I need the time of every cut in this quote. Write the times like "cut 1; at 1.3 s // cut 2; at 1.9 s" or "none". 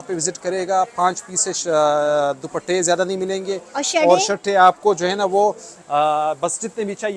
none

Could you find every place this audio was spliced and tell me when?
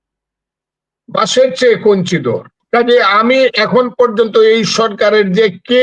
cut 1; at 2.5 s

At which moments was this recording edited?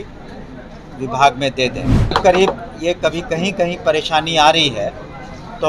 cut 1; at 2.1 s

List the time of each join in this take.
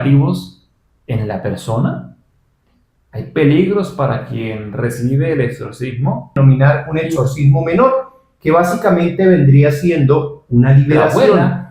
cut 1; at 6.4 s

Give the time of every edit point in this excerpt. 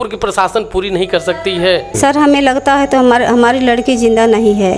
cut 1; at 1.9 s

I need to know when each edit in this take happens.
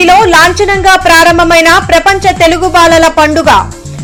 none

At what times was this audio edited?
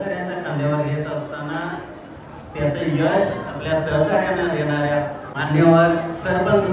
cut 1; at 5.3 s

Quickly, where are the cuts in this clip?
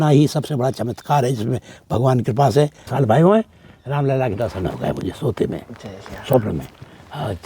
cut 1; at 2.9 s

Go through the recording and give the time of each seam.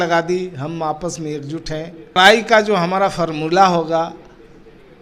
cut 1; at 2.2 s

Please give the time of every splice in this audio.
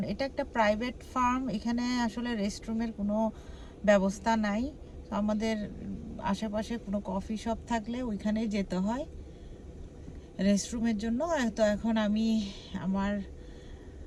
none

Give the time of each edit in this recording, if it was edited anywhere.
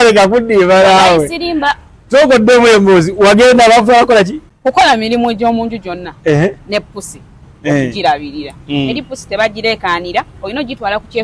cut 1; at 4.4 s

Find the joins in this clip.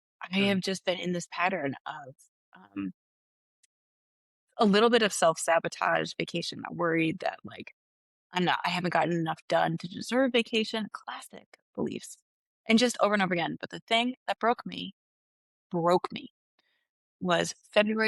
none

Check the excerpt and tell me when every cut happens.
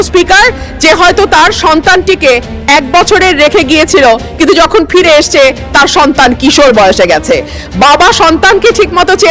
none

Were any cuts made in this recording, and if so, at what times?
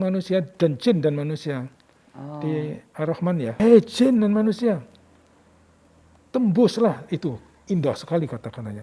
cut 1; at 3.6 s

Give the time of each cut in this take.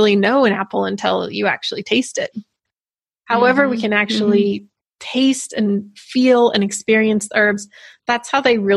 cut 1; at 2.7 s

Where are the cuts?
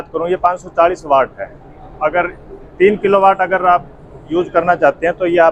none

